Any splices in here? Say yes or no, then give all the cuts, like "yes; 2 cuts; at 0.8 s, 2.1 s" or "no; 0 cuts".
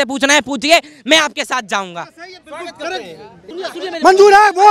no; 0 cuts